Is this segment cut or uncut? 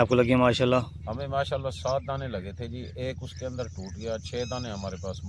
uncut